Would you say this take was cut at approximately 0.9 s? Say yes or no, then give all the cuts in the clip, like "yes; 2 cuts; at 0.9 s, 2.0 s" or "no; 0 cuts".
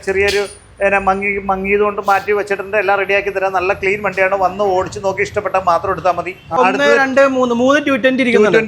no; 1 cut; at 6.6 s